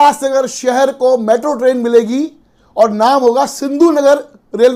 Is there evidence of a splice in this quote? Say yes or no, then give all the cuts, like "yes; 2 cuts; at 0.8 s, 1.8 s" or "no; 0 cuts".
no; 0 cuts